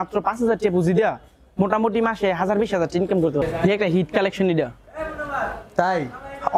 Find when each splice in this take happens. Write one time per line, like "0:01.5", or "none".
0:03.4